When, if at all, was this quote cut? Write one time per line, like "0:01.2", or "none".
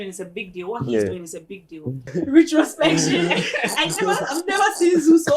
0:02.0